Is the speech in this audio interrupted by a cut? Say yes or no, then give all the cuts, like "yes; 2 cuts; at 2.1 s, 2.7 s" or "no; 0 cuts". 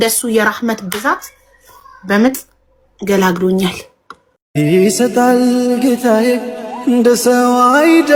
no; 0 cuts